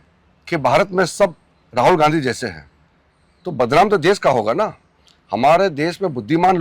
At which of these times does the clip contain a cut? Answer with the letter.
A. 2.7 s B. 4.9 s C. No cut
C